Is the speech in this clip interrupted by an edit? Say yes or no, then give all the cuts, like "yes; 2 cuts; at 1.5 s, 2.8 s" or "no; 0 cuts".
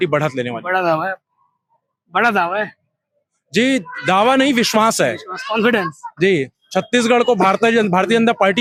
no; 0 cuts